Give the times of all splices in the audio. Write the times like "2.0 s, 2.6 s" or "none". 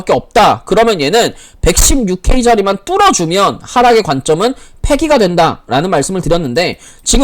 none